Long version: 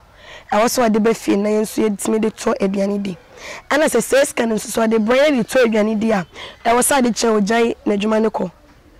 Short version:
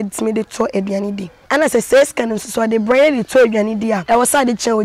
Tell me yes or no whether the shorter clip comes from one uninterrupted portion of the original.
no